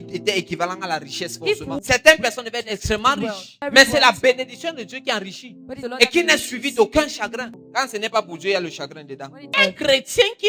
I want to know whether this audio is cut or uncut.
cut